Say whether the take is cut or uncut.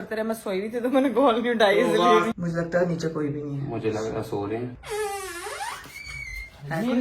cut